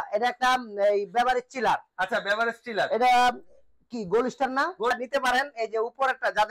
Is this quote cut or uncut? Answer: cut